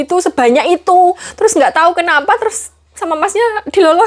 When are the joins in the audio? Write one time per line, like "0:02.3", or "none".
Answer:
0:01.3